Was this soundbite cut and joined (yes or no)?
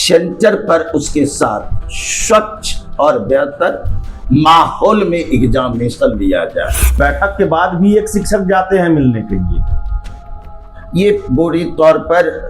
yes